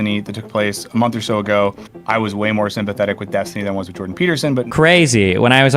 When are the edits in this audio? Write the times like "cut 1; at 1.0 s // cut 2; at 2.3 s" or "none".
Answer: cut 1; at 1.9 s // cut 2; at 4.7 s